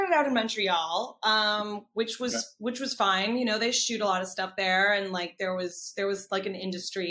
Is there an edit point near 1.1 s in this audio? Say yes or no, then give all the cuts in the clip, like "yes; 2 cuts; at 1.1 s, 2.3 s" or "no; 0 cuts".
no; 0 cuts